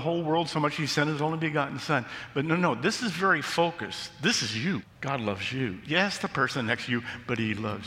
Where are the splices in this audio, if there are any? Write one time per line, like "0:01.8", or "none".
0:04.9